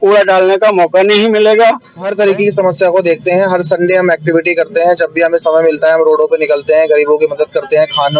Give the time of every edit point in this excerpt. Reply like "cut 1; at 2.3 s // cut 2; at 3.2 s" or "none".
cut 1; at 2.1 s